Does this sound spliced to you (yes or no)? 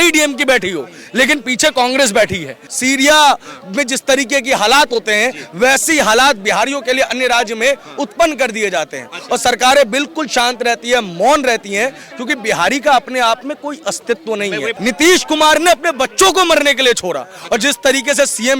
yes